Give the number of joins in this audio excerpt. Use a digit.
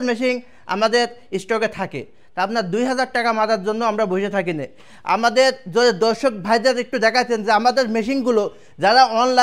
0